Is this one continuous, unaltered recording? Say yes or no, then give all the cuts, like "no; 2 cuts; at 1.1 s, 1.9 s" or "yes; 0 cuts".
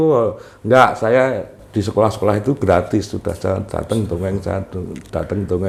yes; 0 cuts